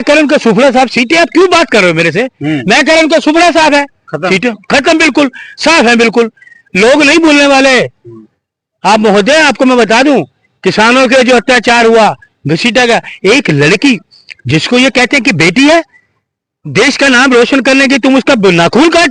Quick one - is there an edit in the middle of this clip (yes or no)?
no